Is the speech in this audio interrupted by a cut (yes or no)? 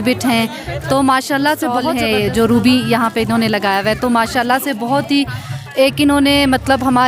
yes